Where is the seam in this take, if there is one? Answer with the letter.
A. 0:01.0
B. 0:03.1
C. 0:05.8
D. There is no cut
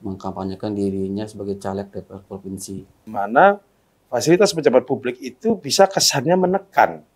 B